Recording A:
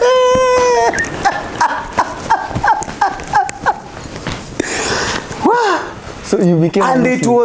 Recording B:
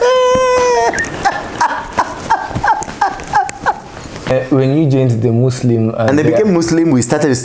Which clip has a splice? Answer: B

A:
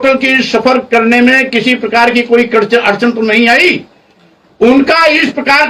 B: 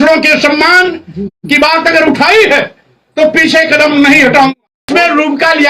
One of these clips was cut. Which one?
B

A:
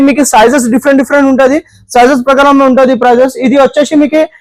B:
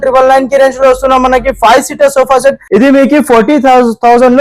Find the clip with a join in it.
B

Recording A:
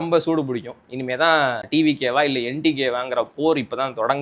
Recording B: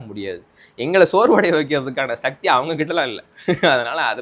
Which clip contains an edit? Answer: A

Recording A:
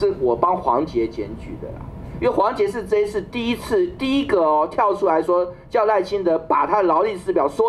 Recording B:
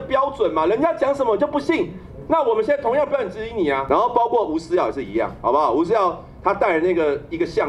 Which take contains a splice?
B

